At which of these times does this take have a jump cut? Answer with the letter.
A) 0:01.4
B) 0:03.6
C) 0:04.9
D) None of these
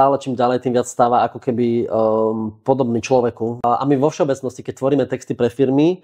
B